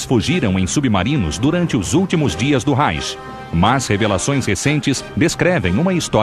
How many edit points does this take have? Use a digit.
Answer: 1